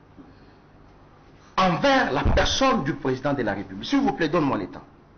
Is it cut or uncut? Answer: uncut